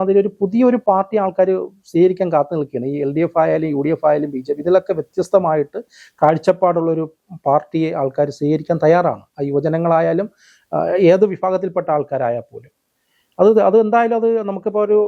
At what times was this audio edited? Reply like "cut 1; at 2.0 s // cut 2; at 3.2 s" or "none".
none